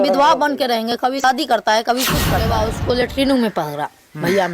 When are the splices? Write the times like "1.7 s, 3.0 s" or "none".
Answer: 1.2 s, 2.5 s